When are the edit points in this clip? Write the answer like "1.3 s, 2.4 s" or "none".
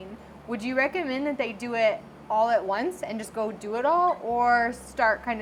none